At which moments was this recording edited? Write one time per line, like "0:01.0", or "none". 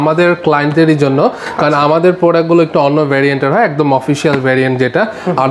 none